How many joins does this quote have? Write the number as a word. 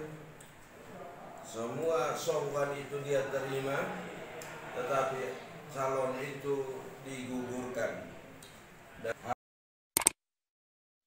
one